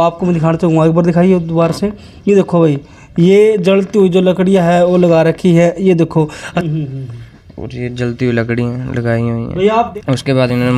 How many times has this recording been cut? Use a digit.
2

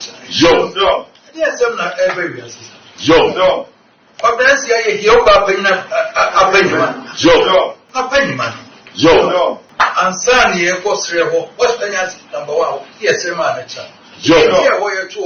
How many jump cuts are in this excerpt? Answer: 2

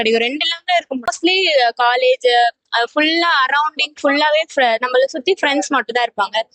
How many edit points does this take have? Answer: 0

